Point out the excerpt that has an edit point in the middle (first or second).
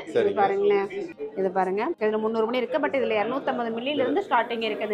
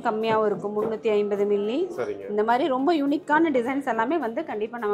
first